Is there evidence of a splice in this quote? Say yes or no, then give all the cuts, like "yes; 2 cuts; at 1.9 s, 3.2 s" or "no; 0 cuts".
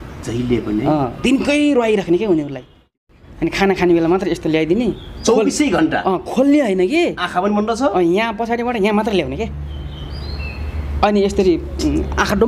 yes; 1 cut; at 2.9 s